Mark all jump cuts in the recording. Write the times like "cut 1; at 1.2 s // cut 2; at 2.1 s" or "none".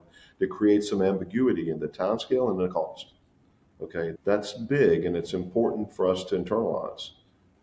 none